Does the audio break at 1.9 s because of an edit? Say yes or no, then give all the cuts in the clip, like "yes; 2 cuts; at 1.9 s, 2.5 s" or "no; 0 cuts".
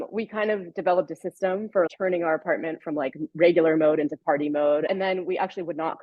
yes; 2 cuts; at 1.9 s, 4.9 s